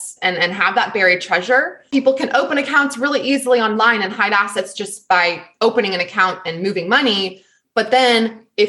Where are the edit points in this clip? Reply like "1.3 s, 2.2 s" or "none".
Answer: 1.9 s